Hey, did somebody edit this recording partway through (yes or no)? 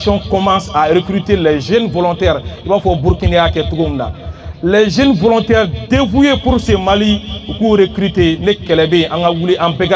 no